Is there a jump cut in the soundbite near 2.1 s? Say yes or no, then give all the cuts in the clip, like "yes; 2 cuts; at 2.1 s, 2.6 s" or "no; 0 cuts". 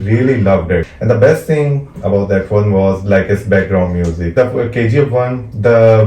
no; 2 cuts; at 0.9 s, 4.3 s